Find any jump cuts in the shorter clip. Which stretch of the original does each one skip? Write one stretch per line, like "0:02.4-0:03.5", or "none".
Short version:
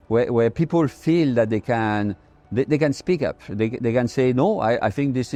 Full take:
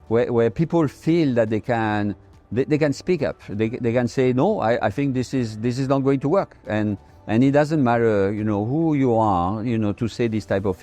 none